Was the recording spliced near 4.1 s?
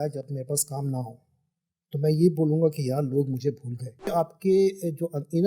yes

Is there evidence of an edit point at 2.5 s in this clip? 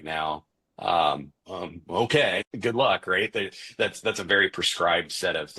yes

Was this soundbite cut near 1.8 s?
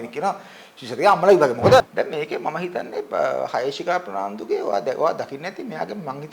yes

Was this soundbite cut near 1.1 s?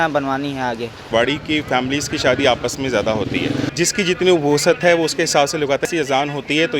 yes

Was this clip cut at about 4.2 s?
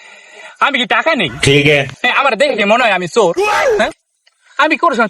no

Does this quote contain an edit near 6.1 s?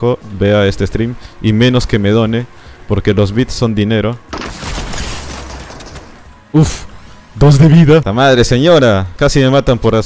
yes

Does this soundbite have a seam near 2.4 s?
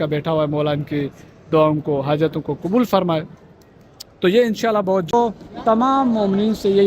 yes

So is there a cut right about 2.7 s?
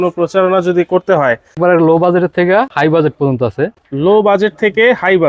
yes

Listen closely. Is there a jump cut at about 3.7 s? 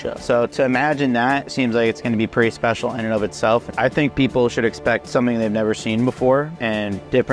yes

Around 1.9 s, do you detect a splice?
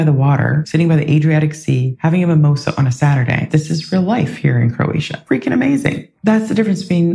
yes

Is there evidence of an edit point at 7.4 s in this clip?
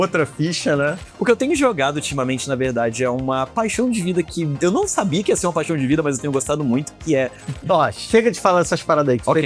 yes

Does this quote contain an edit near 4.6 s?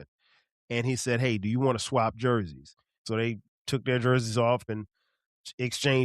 yes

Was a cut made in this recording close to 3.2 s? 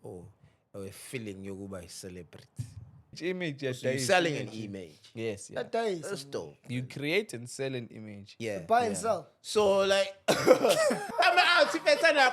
yes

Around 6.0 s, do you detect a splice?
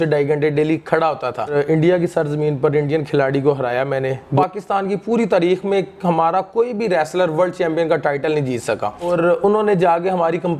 no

